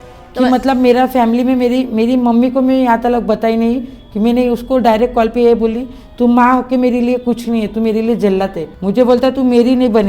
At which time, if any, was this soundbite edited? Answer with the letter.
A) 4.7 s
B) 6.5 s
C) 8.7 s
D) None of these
C